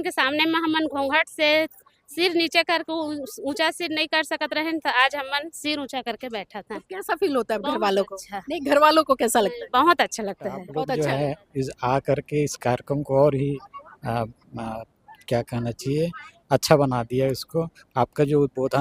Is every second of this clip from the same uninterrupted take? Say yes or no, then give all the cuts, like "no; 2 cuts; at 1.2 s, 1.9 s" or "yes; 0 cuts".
no; 1 cut; at 10.7 s